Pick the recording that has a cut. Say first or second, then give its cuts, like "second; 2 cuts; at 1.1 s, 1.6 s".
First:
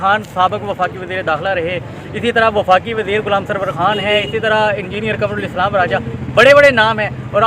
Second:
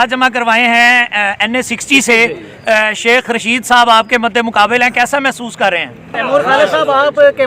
second; 1 cut; at 6.2 s